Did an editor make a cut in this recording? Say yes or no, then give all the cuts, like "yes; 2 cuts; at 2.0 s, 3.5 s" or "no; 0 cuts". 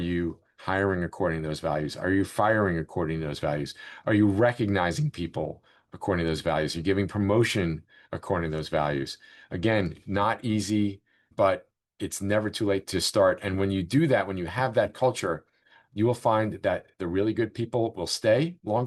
no; 0 cuts